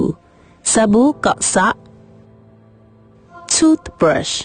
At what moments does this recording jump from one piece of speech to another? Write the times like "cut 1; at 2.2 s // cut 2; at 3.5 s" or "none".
cut 1; at 1.7 s